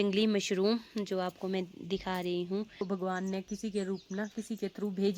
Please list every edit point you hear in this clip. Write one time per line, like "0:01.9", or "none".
0:02.8